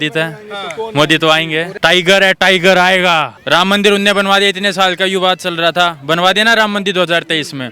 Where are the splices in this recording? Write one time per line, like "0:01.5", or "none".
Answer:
0:01.7
0:03.4